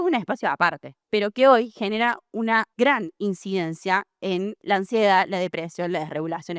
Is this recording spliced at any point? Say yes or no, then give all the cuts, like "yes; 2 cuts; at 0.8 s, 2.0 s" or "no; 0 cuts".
yes; 3 cuts; at 0.9 s, 2.7 s, 4.6 s